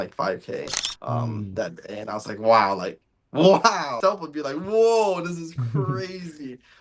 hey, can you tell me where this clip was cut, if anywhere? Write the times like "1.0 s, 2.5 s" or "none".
3.9 s